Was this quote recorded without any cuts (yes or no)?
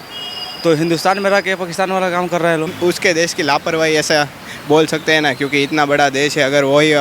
no